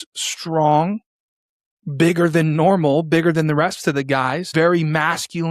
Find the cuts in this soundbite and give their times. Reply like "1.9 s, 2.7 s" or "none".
4.4 s